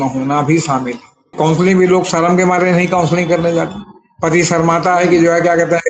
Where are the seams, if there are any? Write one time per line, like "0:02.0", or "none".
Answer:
0:01.3